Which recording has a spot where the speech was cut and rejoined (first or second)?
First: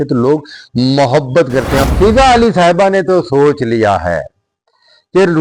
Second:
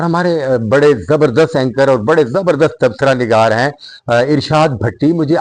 first